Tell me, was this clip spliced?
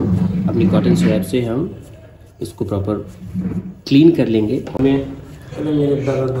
yes; 1 cut; at 4.8 s

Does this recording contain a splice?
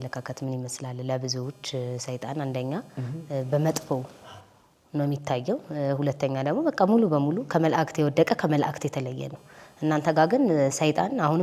no; 0 cuts

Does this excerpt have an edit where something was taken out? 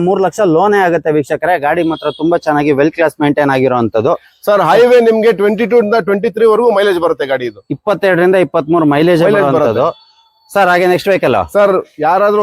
no; 0 cuts

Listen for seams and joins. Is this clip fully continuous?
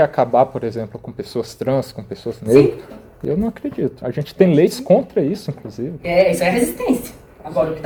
yes; 0 cuts

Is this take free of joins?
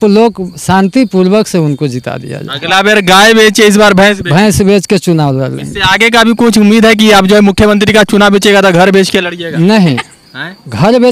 yes; 0 cuts

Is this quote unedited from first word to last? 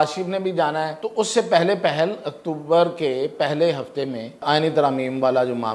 no; 2 cuts; at 1.0 s, 4.4 s

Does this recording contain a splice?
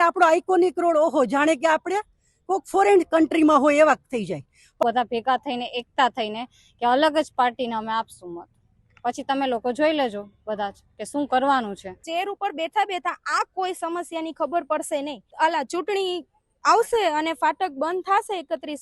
yes; 3 cuts; at 4.8 s, 12.0 s, 15.2 s

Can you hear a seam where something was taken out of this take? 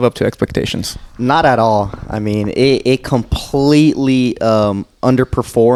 no; 0 cuts

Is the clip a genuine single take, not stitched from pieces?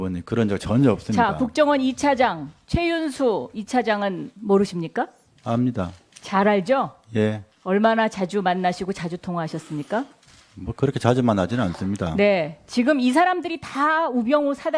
no; 1 cut; at 7.8 s

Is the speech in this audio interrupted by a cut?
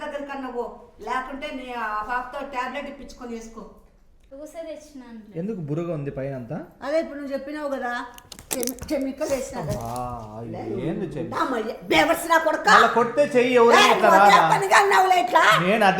yes; 1 cut; at 4.2 s

